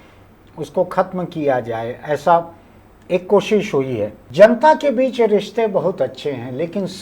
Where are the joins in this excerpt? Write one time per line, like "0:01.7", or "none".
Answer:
0:04.2